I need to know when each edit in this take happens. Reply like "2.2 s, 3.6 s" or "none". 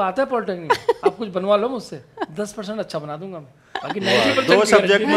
none